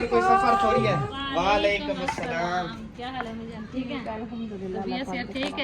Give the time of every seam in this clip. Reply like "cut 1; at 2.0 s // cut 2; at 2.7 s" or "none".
cut 1; at 1.1 s